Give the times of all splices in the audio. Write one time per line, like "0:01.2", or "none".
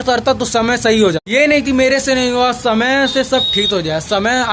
0:01.2